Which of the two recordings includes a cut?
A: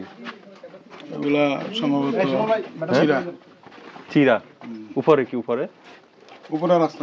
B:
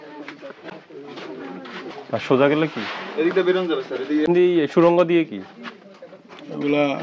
B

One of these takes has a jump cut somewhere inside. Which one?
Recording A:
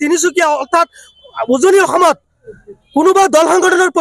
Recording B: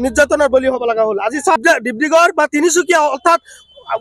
B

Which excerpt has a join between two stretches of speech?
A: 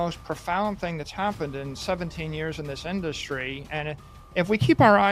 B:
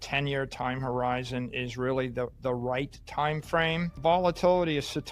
B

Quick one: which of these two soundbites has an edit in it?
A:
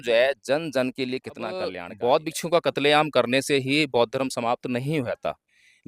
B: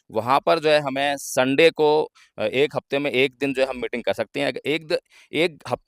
A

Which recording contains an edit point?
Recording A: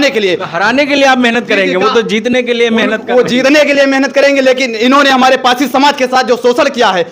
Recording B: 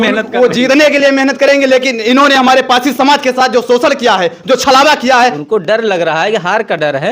B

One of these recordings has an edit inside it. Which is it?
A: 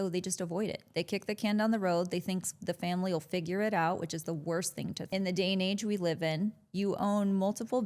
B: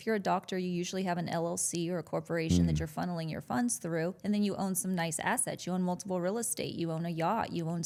A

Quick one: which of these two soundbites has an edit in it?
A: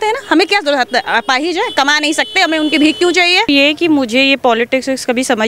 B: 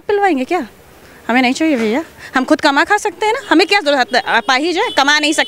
A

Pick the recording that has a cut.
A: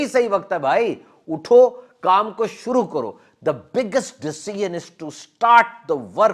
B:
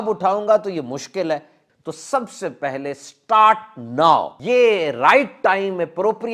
B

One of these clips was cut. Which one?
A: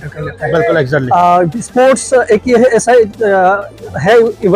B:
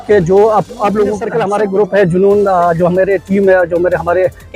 B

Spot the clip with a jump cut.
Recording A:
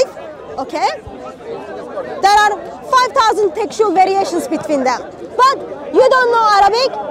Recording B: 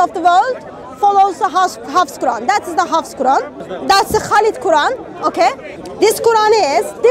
B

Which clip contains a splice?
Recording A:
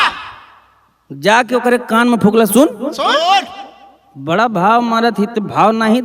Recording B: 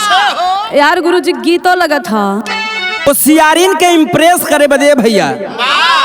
B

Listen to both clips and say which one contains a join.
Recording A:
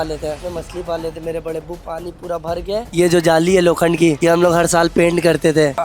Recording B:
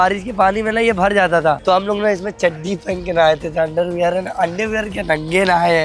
A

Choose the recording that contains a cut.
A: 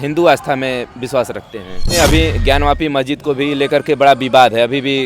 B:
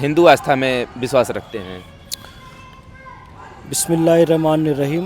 A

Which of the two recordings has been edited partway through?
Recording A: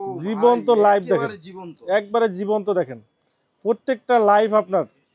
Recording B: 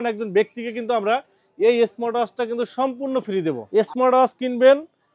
B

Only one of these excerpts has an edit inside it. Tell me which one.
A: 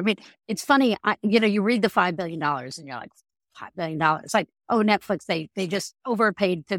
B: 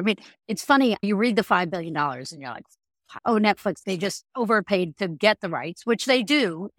B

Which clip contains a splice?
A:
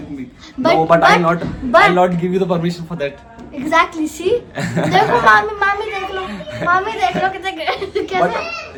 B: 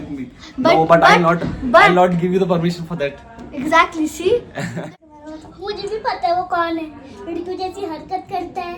B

